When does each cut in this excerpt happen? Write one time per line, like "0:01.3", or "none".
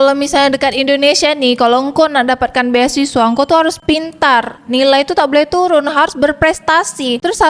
none